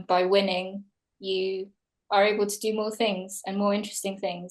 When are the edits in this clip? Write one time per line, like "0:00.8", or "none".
none